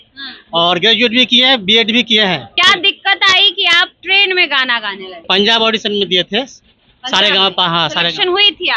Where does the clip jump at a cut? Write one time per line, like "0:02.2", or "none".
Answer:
0:02.5
0:05.1